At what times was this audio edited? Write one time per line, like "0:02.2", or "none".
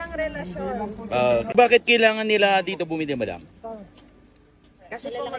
0:01.6